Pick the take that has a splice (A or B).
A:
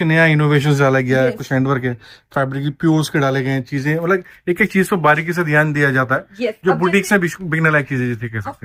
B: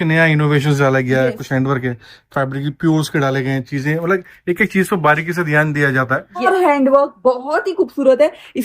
B